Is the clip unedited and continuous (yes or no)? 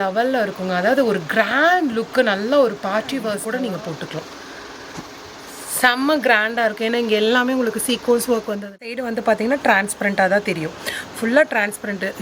no